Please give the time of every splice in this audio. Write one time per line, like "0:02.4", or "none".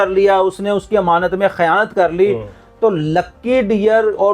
none